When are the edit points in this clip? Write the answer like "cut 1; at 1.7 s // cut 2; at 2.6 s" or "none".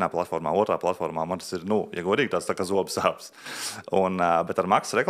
none